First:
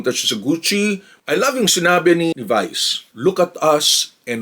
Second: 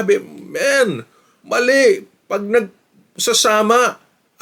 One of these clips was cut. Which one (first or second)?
first